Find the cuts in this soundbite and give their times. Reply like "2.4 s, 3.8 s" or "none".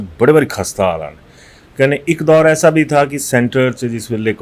none